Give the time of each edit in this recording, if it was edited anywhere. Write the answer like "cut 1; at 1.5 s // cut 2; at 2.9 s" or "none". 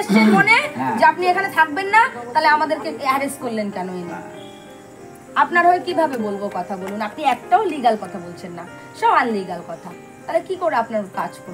none